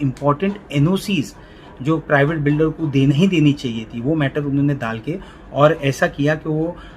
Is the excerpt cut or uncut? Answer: cut